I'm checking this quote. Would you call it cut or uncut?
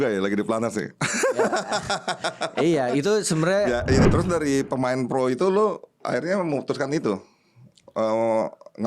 cut